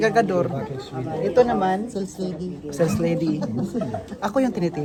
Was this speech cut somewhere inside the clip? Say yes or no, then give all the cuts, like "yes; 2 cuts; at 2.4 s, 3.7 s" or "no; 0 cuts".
no; 0 cuts